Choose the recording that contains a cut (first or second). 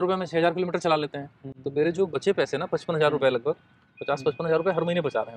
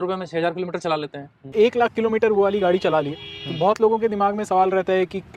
second